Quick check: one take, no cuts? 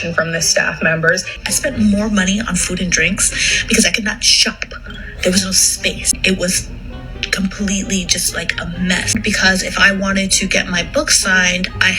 no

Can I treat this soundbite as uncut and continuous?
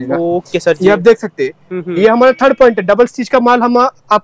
yes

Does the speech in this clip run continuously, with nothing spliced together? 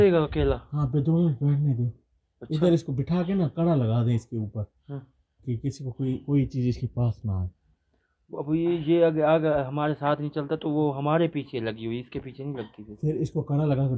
yes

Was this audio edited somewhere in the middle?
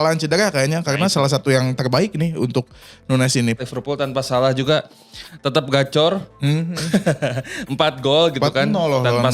yes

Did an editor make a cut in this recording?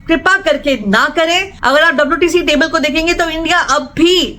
yes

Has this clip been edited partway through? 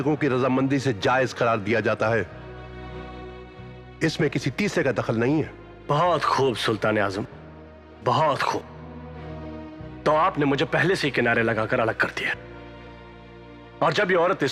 no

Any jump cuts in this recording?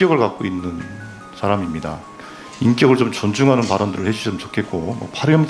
yes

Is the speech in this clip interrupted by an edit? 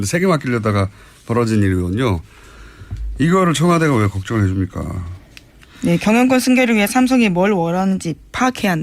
yes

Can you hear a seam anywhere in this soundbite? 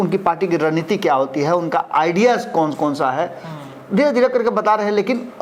no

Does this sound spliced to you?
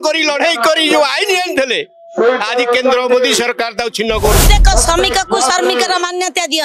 yes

